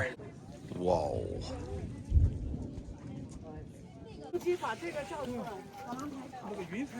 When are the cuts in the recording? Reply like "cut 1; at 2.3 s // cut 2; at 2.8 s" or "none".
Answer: cut 1; at 4.2 s